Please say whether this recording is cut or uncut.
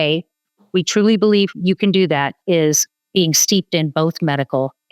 cut